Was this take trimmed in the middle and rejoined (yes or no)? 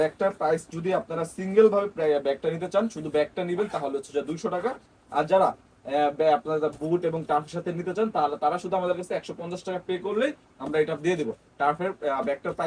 no